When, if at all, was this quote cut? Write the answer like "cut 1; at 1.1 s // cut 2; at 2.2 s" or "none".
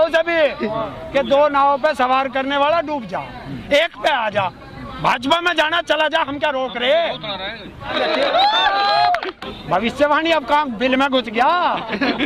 cut 1; at 7.9 s